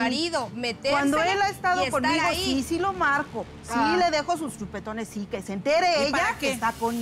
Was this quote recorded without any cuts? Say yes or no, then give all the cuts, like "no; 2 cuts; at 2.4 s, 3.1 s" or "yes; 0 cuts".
yes; 0 cuts